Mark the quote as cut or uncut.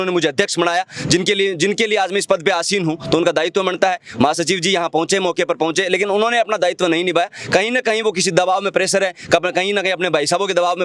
uncut